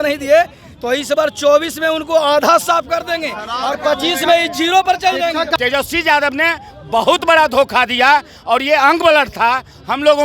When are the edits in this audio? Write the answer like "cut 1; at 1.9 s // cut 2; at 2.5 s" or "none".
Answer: cut 1; at 5.5 s